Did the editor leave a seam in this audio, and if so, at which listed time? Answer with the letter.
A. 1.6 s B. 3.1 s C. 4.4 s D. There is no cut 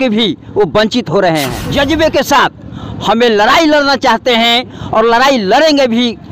A